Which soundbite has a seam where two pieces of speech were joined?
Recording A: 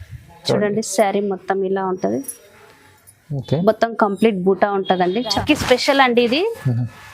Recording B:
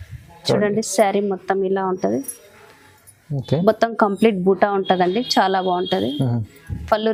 A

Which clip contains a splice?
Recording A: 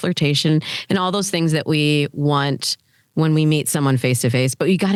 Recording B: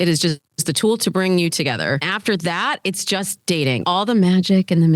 B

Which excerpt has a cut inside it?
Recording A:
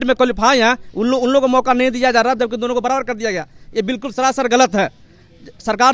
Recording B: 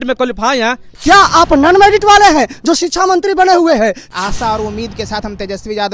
B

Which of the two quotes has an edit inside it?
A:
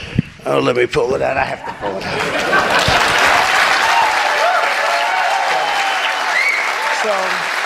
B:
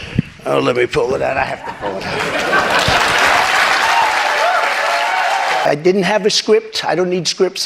B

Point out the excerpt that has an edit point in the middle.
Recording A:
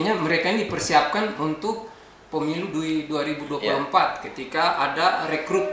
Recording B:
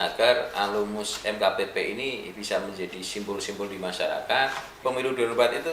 B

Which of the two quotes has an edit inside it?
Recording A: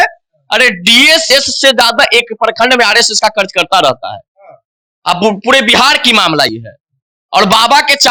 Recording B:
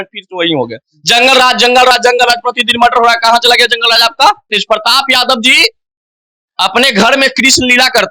B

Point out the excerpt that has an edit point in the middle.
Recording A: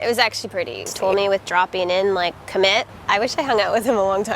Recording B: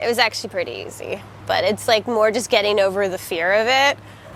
A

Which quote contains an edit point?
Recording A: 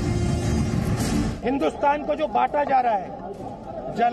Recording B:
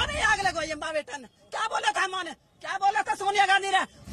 A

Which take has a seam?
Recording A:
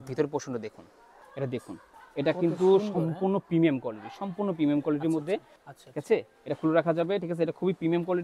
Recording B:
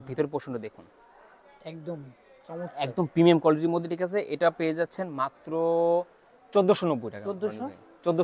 A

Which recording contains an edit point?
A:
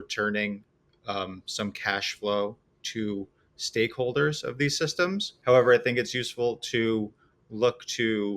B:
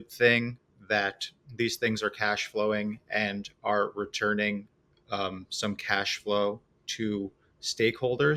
A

